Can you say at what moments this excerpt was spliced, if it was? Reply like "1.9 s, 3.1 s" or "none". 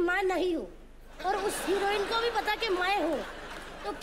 1.2 s

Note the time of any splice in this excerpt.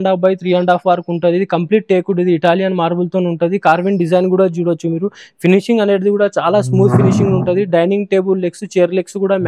none

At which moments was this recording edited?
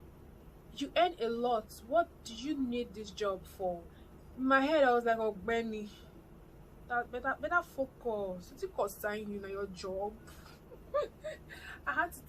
none

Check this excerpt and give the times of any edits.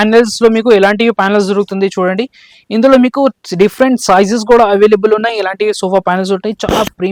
none

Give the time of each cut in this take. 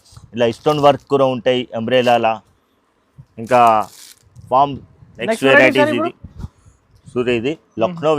5.1 s

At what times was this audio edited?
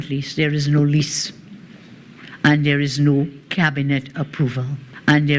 4.4 s

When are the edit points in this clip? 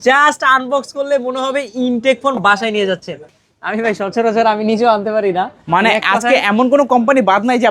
3.3 s

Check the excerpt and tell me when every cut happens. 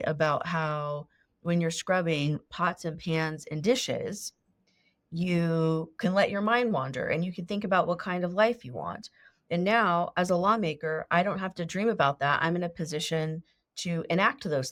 none

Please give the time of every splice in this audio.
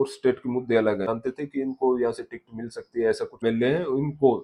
1.1 s, 3.4 s

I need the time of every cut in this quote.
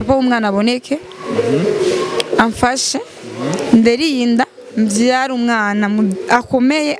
none

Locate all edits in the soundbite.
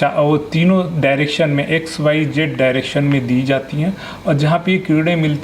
none

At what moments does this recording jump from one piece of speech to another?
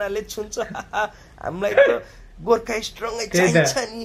none

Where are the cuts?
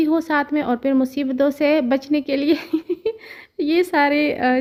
none

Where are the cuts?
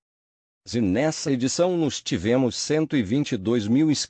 none

